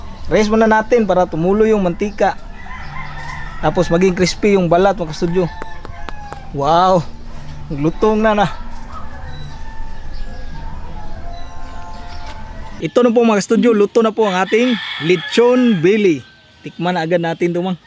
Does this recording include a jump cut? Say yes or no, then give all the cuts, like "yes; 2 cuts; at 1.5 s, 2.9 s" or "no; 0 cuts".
no; 0 cuts